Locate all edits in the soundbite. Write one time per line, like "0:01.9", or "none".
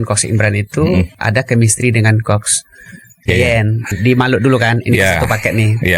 0:01.1
0:03.9